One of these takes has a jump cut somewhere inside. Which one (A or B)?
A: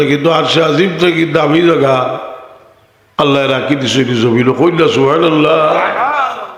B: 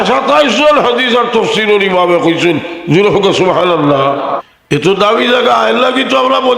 B